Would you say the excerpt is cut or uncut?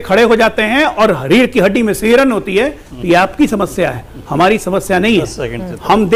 uncut